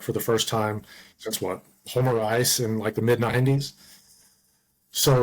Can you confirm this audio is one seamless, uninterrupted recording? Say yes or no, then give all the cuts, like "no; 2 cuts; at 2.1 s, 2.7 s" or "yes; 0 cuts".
yes; 0 cuts